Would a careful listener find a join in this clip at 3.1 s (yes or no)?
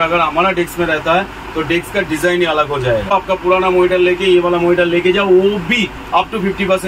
yes